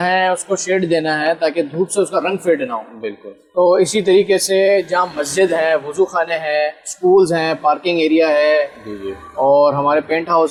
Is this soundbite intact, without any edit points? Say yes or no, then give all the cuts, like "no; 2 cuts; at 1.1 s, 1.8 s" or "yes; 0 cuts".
yes; 0 cuts